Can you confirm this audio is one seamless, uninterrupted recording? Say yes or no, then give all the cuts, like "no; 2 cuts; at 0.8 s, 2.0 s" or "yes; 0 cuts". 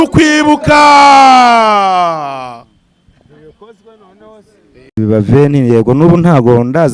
no; 1 cut; at 5.0 s